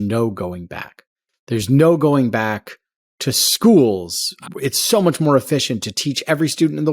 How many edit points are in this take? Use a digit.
1